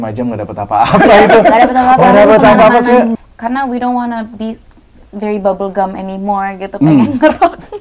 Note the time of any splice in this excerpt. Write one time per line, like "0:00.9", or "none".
0:03.2